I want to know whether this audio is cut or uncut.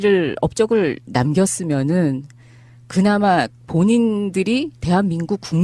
cut